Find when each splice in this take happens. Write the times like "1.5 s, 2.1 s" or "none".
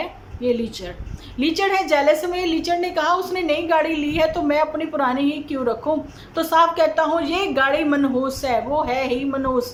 none